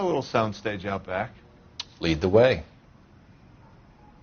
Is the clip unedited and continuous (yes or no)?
no